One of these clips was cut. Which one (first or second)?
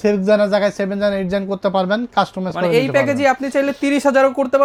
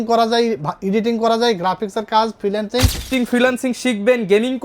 second